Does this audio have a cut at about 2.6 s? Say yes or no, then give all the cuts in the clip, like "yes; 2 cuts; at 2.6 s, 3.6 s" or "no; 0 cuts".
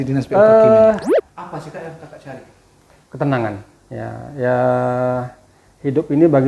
no; 1 cut; at 1.3 s